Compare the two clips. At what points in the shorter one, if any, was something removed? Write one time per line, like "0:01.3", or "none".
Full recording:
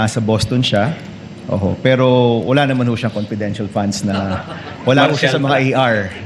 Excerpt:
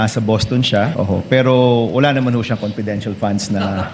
0:00.9